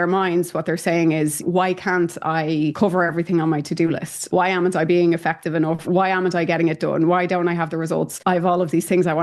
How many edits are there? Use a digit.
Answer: 2